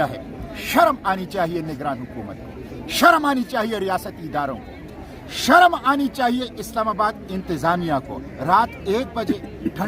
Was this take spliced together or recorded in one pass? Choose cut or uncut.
uncut